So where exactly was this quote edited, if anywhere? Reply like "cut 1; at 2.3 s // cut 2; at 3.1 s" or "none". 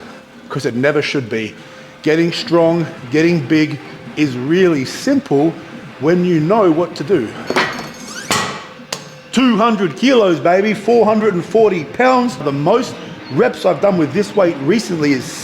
cut 1; at 7.9 s // cut 2; at 12.5 s